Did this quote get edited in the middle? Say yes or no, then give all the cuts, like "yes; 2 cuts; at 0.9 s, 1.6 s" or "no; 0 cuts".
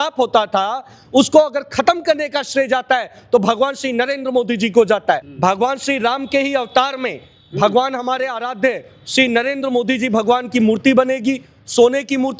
yes; 1 cut; at 5.3 s